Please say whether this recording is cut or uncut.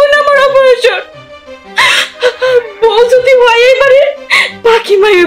uncut